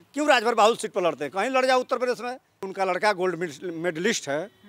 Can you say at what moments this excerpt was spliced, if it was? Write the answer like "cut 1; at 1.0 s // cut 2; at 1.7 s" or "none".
cut 1; at 2.7 s

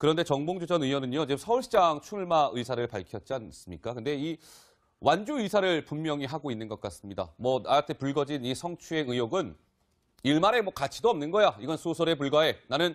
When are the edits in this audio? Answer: none

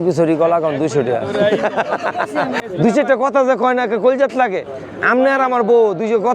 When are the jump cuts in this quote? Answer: cut 1; at 2.6 s

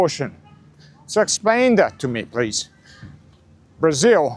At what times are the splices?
none

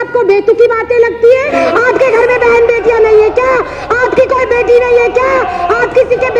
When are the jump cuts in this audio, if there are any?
cut 1; at 1.5 s

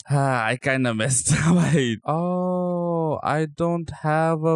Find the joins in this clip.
cut 1; at 2.0 s

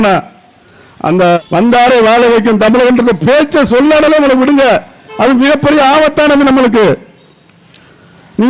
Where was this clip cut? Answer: cut 1; at 1.4 s

